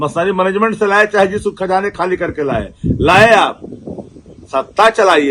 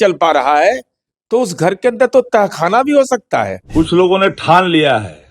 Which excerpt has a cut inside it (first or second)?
second